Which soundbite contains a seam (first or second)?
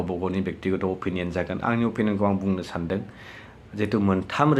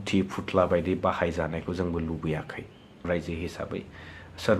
second